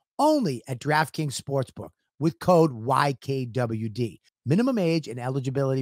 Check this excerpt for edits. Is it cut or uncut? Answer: uncut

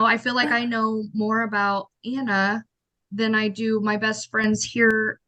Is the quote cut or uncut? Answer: uncut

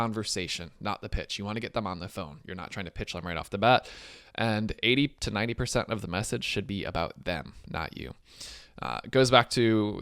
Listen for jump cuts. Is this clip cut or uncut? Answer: uncut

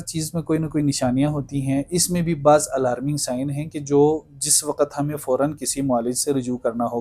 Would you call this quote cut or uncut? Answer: uncut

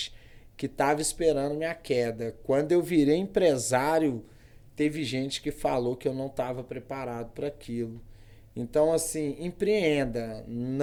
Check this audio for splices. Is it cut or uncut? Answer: uncut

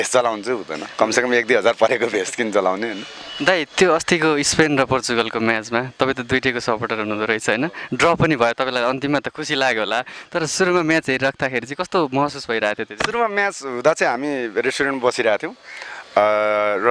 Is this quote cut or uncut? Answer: uncut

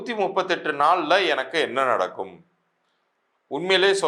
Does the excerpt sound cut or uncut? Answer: uncut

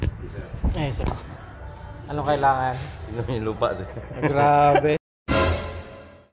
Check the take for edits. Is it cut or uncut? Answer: cut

